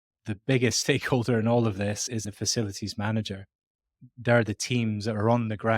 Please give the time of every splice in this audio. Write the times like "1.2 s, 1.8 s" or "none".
2.2 s, 3.9 s